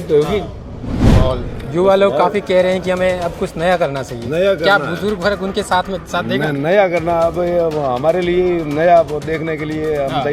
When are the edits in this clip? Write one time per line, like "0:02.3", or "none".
0:01.1